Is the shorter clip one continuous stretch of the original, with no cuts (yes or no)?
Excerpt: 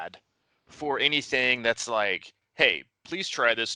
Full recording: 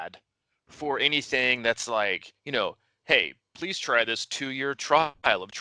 no